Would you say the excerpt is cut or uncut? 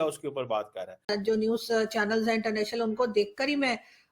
cut